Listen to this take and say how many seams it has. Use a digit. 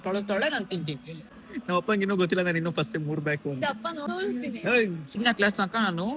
3